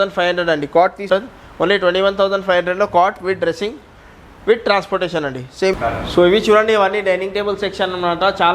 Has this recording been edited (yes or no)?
yes